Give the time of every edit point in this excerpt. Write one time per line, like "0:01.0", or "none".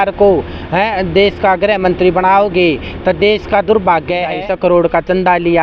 0:04.4